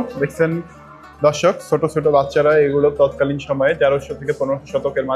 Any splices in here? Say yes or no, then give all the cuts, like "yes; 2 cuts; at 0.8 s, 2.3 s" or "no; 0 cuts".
no; 0 cuts